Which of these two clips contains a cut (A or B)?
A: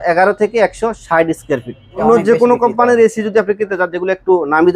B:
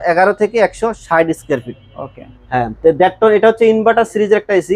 A